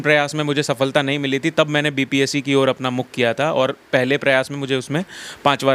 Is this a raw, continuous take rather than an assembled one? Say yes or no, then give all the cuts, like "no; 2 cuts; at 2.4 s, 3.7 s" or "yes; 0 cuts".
yes; 0 cuts